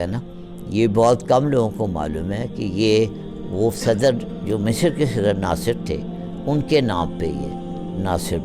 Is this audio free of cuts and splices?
yes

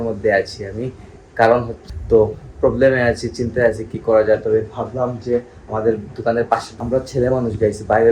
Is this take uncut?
no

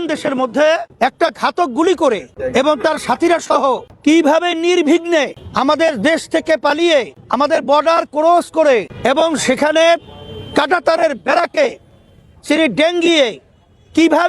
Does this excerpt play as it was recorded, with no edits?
no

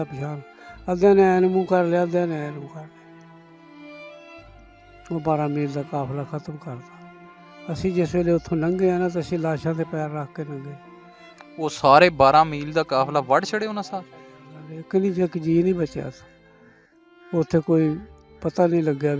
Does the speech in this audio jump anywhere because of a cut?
yes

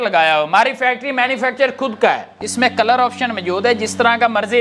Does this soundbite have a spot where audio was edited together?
yes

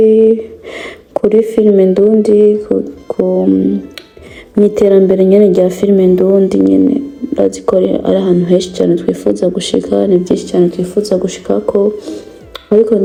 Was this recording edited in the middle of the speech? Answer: no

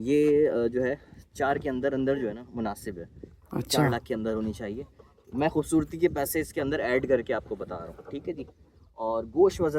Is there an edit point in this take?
no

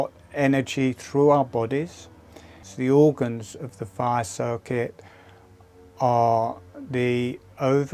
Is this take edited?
yes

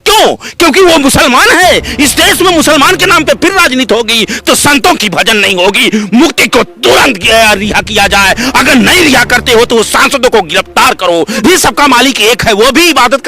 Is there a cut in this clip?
yes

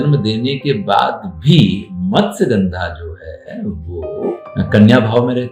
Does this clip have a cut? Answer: yes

